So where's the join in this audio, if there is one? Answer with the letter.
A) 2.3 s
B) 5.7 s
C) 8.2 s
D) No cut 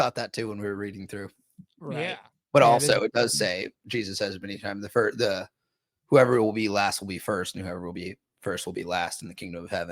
A